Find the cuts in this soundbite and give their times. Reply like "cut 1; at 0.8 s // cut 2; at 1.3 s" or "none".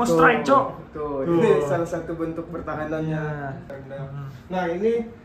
cut 1; at 3.7 s